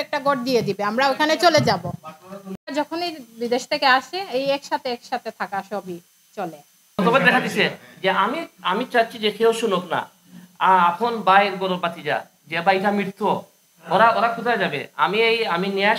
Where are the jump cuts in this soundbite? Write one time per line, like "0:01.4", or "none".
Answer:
0:02.5
0:06.8